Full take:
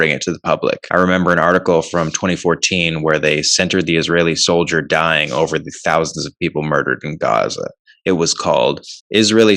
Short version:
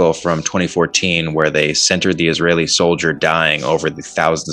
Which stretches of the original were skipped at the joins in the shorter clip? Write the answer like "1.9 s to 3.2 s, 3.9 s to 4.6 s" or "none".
none